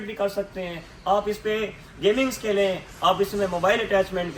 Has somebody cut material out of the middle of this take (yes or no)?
no